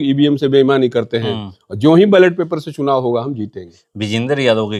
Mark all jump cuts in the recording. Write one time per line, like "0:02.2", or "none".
none

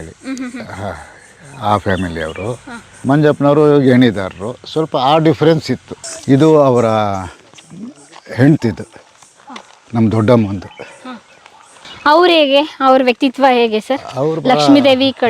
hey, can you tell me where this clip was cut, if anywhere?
0:02.9
0:06.0

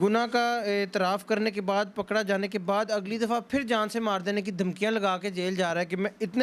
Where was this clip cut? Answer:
none

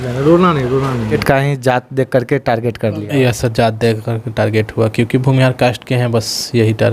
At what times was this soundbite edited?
0:01.2

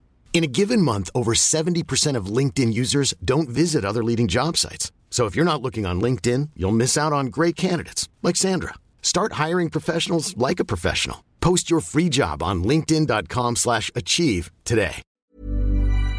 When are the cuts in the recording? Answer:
0:15.1

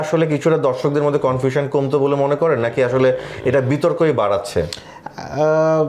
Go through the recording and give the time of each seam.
none

